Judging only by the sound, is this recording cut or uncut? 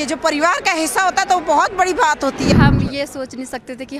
cut